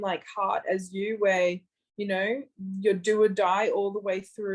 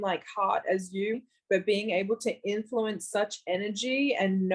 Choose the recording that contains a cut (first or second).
second